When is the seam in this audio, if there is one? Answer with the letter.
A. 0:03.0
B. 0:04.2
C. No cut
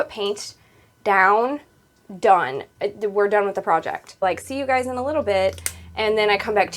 B